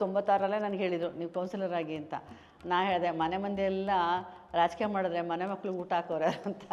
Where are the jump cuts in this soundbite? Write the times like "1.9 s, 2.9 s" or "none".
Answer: none